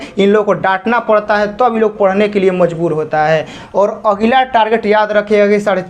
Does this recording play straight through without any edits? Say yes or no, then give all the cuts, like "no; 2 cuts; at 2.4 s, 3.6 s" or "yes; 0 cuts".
no; 1 cut; at 3.6 s